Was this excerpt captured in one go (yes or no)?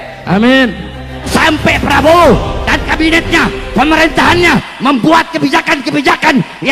no